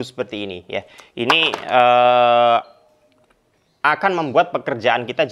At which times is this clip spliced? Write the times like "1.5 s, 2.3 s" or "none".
none

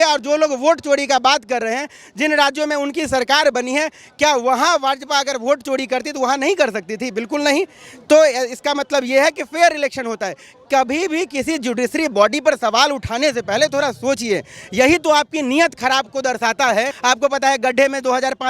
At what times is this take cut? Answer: 16.9 s

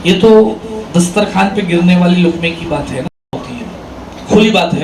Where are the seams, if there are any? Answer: 3.3 s

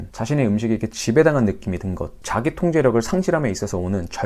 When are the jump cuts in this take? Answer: none

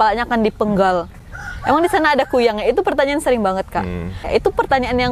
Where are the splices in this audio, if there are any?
4.2 s

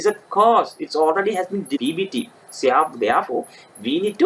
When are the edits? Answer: 1.8 s

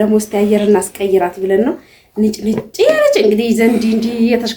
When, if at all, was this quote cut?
none

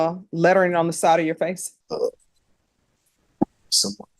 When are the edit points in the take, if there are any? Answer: 1.7 s

